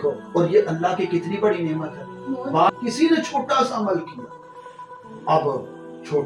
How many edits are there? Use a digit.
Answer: 1